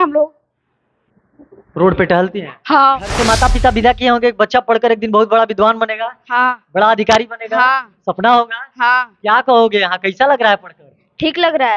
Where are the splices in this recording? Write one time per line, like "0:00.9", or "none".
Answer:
0:03.2